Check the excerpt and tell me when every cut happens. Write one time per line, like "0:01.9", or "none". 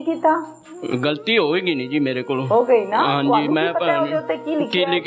none